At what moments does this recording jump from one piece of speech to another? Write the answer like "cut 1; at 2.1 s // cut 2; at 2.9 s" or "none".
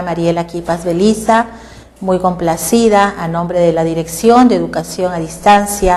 none